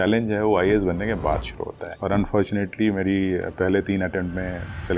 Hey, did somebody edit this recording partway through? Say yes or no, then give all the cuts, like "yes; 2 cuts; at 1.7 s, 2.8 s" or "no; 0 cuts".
yes; 1 cut; at 2.0 s